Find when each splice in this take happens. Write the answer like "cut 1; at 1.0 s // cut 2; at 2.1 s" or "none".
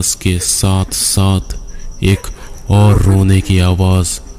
none